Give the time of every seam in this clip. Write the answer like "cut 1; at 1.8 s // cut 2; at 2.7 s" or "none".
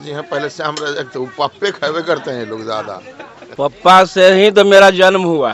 cut 1; at 3.8 s